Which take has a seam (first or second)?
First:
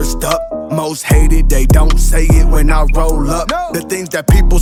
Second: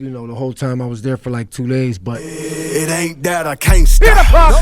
second